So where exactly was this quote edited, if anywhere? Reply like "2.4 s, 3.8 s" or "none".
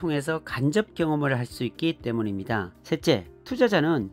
2.7 s